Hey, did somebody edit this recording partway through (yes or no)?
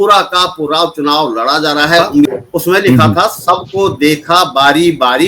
yes